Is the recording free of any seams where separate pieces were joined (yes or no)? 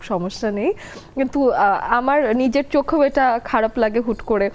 yes